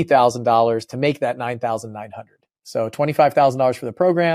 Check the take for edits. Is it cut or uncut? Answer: uncut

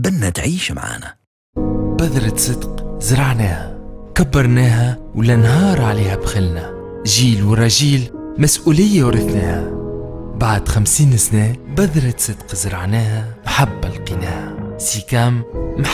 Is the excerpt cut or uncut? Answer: cut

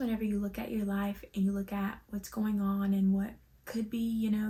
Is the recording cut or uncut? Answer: uncut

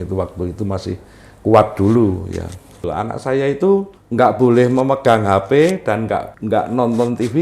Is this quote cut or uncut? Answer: cut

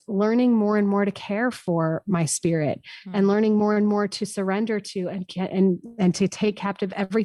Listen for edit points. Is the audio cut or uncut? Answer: uncut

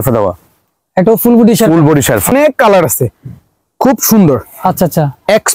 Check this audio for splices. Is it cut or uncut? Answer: cut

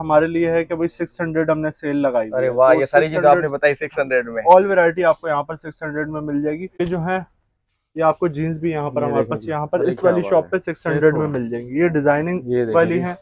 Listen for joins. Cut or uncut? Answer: cut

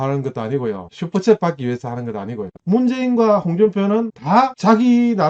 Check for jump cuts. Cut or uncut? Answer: cut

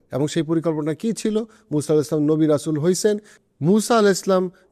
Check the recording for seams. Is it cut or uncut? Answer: cut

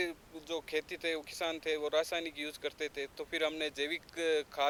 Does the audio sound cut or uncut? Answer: uncut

